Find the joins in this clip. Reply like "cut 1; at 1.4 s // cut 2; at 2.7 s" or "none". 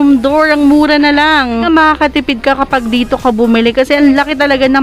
cut 1; at 1.6 s